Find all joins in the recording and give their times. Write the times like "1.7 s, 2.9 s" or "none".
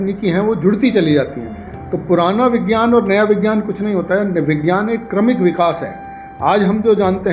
none